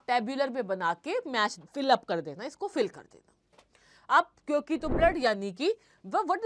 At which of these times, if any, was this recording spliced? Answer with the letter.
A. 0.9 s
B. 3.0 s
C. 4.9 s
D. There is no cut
C